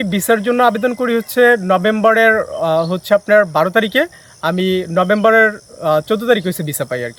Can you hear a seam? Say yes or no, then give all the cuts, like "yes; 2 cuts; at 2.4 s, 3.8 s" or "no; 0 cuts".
no; 0 cuts